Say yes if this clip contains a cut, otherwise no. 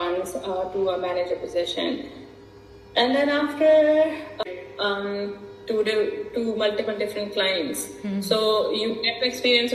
yes